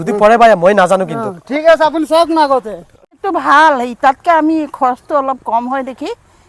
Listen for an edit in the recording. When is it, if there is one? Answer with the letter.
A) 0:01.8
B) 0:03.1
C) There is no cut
B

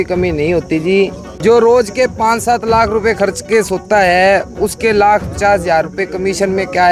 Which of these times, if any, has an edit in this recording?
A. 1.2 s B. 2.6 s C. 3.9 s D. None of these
A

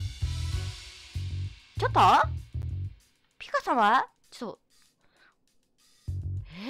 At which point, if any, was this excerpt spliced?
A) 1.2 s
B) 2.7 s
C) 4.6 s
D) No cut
D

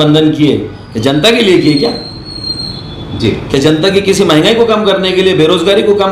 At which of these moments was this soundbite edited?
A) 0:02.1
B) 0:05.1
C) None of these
C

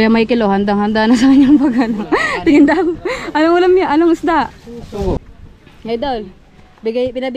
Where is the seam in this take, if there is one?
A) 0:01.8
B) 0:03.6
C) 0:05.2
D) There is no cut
C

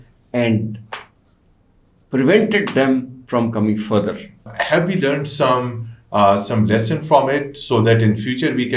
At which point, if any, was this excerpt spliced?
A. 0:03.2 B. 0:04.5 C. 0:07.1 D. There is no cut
B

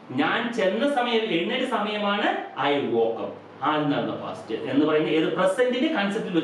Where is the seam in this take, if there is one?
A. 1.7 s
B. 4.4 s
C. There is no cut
C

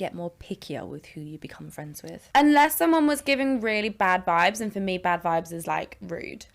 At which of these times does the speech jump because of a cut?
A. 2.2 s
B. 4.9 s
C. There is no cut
A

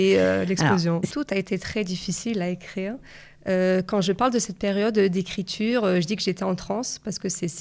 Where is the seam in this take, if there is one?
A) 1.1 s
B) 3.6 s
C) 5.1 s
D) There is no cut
A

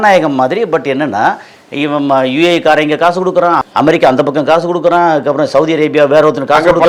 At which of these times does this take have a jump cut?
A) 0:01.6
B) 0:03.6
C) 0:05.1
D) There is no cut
B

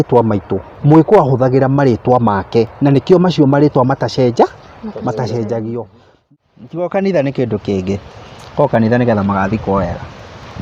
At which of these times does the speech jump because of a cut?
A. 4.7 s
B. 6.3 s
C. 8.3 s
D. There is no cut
B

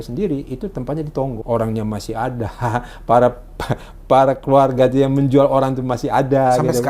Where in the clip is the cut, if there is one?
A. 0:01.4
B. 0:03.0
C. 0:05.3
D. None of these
A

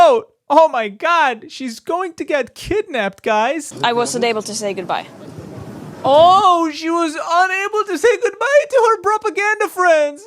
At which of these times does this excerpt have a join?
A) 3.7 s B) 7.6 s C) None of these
A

